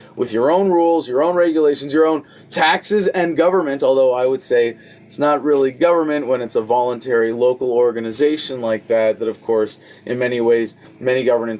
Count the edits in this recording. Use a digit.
0